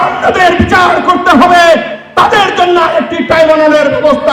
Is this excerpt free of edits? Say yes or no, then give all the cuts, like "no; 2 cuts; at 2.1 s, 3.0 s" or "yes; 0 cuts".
yes; 0 cuts